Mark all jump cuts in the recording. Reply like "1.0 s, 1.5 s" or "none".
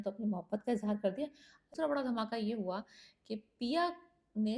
1.7 s